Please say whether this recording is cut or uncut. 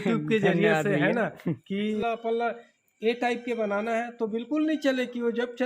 cut